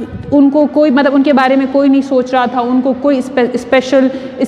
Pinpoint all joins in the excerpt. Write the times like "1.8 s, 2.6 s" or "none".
none